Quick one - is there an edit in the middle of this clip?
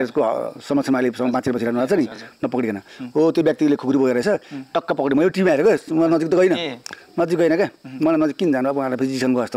no; 0 cuts

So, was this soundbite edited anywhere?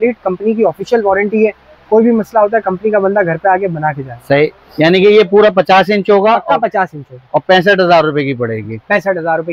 no; 0 cuts

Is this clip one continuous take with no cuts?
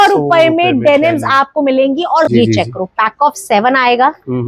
no; 1 cut; at 2.3 s

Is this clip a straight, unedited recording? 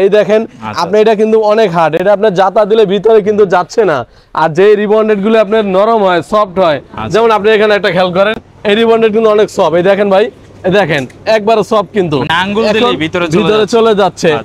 yes; 0 cuts

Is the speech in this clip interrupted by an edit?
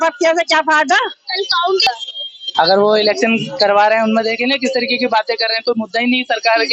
yes; 1 cut; at 1.9 s

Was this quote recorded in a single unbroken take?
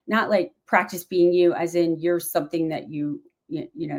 yes; 0 cuts

